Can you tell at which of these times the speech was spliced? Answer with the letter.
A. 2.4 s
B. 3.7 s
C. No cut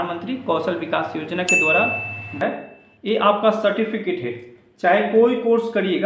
A